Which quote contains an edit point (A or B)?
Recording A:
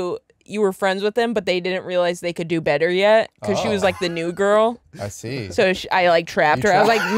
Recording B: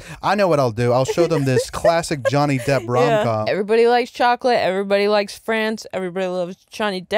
B